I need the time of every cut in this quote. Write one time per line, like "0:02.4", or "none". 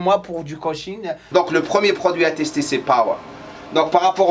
0:01.2